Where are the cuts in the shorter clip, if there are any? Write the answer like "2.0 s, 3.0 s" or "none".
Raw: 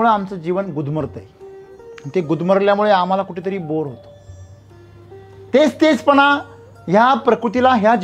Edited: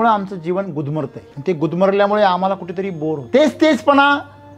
1.2 s, 3.2 s